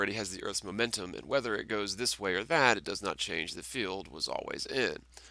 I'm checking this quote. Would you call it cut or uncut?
uncut